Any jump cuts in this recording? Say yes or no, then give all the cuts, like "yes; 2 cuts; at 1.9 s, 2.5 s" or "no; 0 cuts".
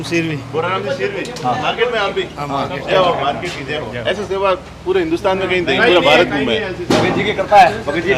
no; 0 cuts